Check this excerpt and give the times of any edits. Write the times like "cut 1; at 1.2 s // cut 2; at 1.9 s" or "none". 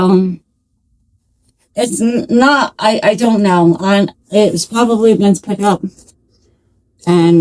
none